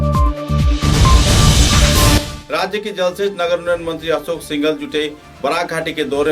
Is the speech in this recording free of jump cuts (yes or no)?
yes